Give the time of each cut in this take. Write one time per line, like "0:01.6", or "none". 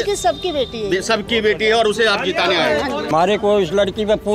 0:03.1